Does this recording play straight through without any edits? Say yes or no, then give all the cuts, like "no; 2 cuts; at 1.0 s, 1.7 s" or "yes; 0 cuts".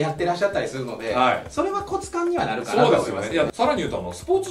no; 1 cut; at 3.5 s